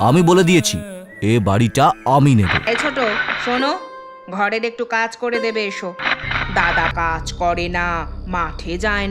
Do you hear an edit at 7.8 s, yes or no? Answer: no